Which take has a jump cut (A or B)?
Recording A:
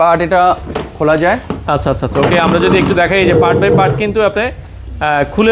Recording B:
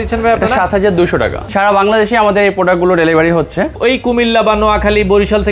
B